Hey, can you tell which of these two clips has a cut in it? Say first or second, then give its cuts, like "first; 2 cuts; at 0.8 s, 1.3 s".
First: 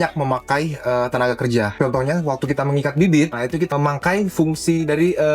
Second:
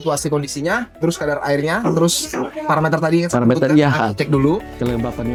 first; 2 cuts; at 1.7 s, 3.4 s